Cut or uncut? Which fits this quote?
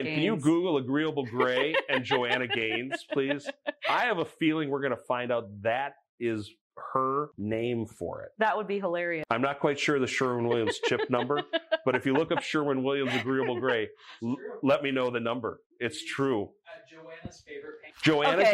cut